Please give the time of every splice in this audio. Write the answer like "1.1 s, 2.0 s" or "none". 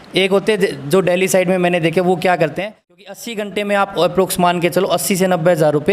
3.0 s